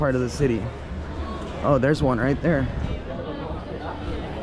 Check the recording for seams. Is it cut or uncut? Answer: uncut